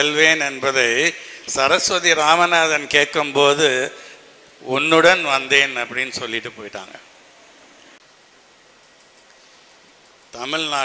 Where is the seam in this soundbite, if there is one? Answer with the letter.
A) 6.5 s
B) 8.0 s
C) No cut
B